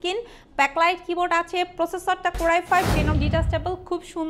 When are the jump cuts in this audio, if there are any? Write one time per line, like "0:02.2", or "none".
0:03.2